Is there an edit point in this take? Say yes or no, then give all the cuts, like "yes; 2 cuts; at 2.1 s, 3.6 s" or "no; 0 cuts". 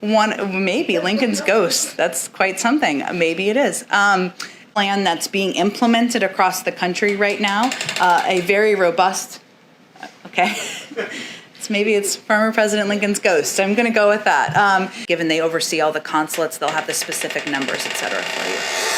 yes; 2 cuts; at 4.7 s, 15.0 s